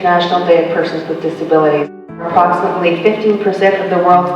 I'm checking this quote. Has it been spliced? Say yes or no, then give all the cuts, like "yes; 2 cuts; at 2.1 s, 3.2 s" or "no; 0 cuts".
yes; 1 cut; at 1.9 s